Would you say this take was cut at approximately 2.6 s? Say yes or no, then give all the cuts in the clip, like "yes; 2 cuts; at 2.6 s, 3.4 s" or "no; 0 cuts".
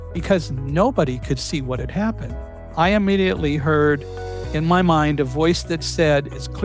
yes; 1 cut; at 2.6 s